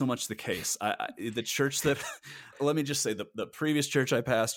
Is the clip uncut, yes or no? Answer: yes